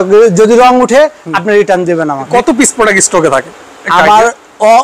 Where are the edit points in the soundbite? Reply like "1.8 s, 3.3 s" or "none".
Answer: 2.3 s